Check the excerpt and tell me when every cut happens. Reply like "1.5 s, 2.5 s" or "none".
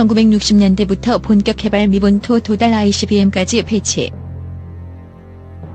4.1 s